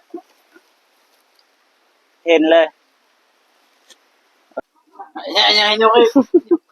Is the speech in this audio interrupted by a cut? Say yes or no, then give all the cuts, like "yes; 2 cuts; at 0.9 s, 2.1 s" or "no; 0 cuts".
yes; 1 cut; at 4.7 s